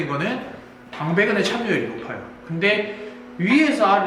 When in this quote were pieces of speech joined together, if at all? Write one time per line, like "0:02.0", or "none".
none